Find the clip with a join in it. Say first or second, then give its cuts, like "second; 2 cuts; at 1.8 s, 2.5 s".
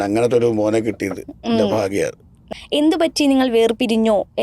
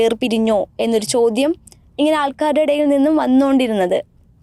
first; 1 cut; at 2.4 s